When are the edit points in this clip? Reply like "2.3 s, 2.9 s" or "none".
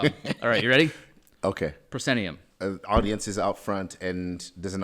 2.4 s